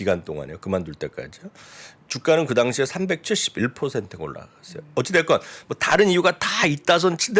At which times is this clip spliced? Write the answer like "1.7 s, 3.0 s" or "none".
none